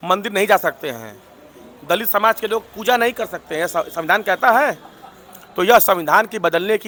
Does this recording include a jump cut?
no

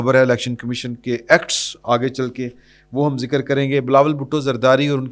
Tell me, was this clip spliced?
no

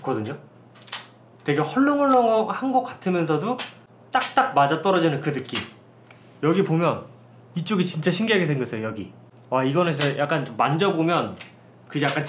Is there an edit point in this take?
no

